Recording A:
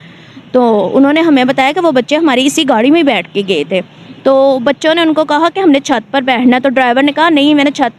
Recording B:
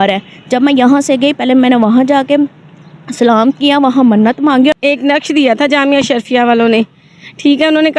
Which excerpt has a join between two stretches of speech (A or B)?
B